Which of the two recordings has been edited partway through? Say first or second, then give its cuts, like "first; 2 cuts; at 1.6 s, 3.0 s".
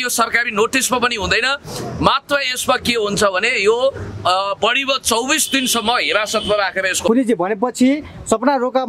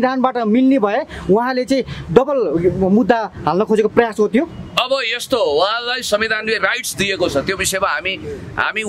first; 1 cut; at 7.1 s